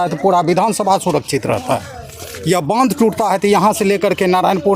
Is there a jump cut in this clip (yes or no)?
no